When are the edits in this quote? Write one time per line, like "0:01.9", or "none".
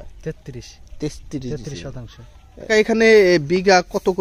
0:02.7